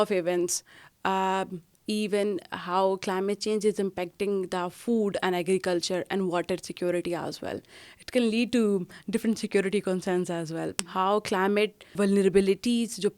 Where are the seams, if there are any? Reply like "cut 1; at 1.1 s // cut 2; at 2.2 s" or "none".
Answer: cut 1; at 10.8 s // cut 2; at 12.0 s